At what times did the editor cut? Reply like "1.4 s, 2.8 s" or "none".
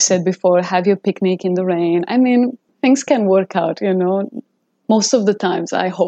2.7 s